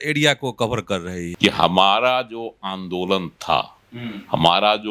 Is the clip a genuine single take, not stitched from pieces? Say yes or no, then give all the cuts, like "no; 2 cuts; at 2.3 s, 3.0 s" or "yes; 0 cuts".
no; 1 cut; at 1.2 s